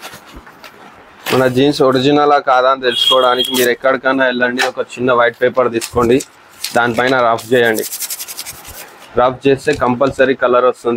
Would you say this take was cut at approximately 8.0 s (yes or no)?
no